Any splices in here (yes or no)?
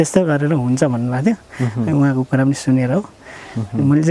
no